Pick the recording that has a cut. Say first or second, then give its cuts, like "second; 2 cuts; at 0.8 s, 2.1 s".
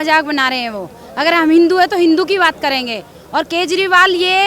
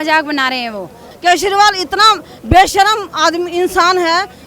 second; 1 cut; at 1.0 s